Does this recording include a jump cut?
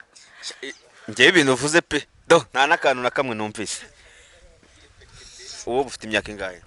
yes; 1 cut; at 5.7 s

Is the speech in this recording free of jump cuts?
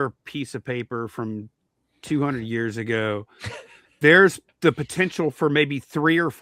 yes; 0 cuts

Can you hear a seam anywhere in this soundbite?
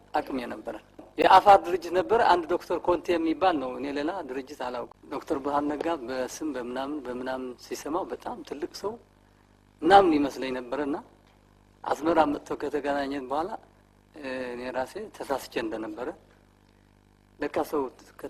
yes; 2 cuts; at 1.1 s, 5.0 s

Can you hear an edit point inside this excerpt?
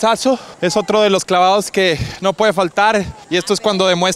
yes; 1 cut; at 3.2 s

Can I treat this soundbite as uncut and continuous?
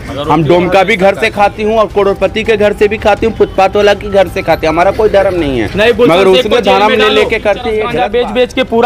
no; 1 cut; at 7.9 s

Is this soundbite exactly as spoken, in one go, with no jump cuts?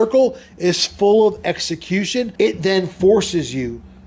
no; 1 cut; at 2.3 s

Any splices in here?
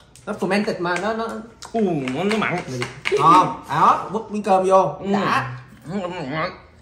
no; 0 cuts

